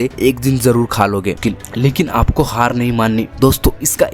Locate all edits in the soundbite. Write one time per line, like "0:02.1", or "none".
0:01.4